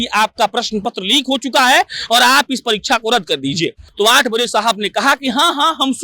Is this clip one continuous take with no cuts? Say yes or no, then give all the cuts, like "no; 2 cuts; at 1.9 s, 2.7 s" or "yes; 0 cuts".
no; 1 cut; at 3.8 s